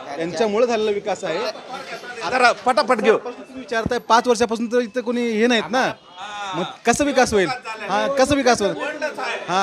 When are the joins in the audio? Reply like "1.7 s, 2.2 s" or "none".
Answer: none